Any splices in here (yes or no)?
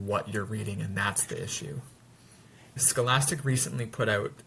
yes